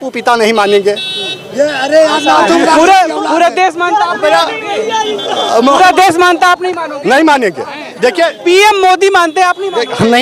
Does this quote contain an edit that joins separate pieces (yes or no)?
no